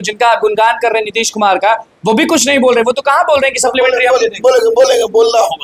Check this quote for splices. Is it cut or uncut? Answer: uncut